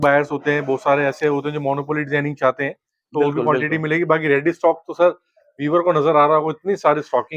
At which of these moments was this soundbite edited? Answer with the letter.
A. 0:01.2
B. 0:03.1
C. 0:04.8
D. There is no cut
D